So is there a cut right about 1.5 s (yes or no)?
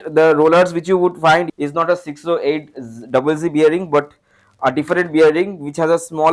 yes